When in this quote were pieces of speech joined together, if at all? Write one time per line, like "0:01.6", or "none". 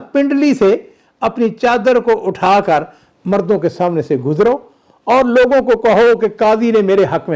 none